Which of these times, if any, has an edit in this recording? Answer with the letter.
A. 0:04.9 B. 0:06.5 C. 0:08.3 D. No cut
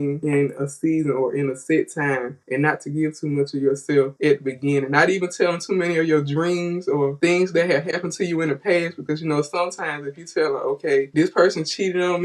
D